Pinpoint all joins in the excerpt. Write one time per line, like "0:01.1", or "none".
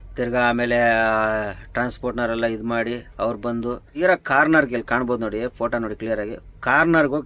0:03.9